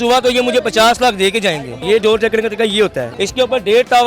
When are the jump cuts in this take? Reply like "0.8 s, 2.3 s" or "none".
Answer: 1.7 s, 3.1 s